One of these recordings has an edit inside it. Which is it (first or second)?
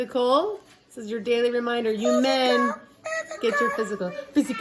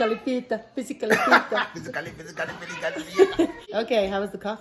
second